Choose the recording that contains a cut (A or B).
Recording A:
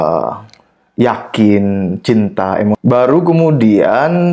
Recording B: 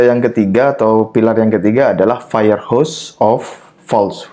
A